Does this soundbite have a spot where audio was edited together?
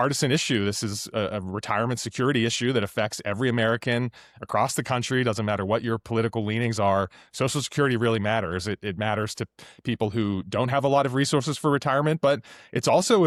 no; 0 cuts

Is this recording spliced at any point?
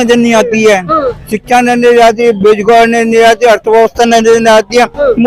no; 0 cuts

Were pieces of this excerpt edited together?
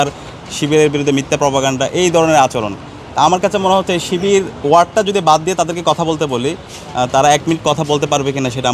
no; 0 cuts

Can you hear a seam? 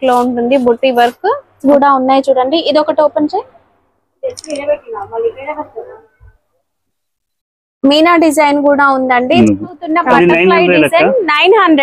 yes; 2 cuts; at 1.6 s, 9.7 s

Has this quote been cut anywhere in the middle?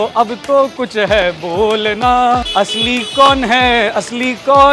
yes; 1 cut; at 2.5 s

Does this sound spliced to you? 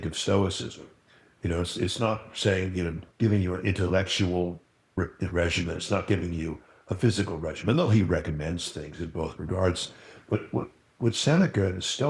yes; 2 cuts; at 3.0 s, 4.9 s

